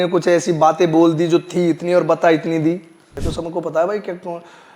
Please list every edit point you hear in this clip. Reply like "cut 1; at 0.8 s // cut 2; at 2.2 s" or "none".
cut 1; at 3.2 s